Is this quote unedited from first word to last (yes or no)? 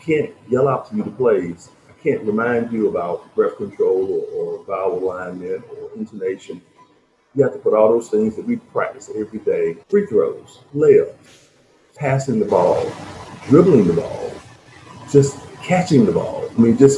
no